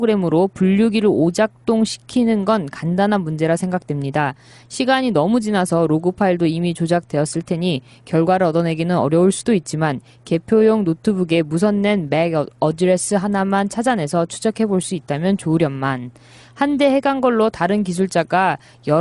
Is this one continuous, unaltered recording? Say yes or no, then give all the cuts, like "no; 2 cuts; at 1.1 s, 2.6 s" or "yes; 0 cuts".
no; 1 cut; at 9.9 s